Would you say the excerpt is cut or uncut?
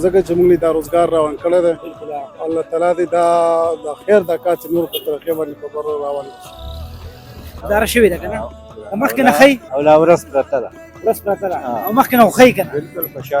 cut